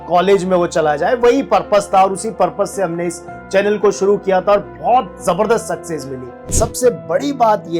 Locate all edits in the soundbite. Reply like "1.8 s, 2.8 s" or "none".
6.5 s